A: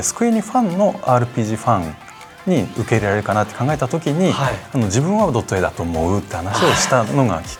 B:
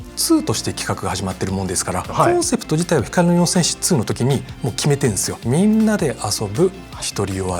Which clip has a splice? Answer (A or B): B